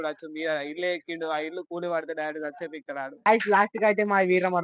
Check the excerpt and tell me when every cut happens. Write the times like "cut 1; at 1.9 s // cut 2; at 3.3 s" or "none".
cut 1; at 3.2 s